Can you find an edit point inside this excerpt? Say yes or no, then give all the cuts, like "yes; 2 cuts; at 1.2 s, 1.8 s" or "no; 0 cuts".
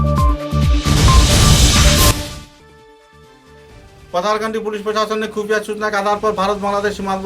yes; 1 cut; at 3.4 s